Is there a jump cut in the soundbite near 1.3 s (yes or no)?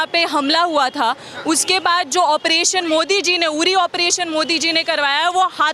no